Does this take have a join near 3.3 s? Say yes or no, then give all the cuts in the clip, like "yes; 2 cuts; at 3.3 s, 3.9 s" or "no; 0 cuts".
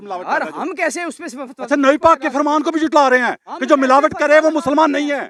no; 0 cuts